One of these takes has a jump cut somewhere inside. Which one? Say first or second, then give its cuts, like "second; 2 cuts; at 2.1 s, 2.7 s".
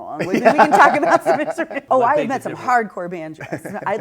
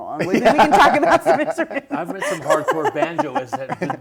first; 1 cut; at 1.8 s